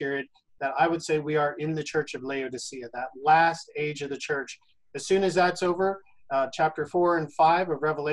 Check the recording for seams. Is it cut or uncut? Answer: uncut